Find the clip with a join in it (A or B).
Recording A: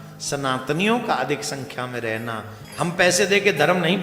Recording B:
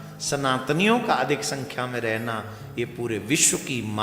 A